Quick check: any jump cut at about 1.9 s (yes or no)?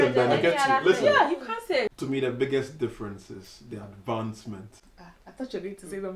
yes